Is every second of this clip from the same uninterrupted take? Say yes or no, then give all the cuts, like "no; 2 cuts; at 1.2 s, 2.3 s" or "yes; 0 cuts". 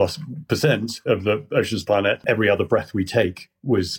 no; 1 cut; at 2.2 s